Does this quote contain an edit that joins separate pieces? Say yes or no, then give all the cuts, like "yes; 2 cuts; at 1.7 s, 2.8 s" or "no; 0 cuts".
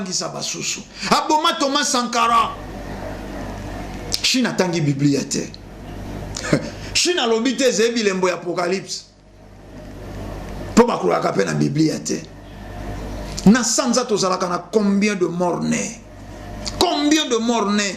yes; 2 cuts; at 2.6 s, 13.3 s